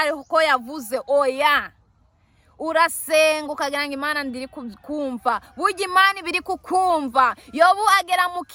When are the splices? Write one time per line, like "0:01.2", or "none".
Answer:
none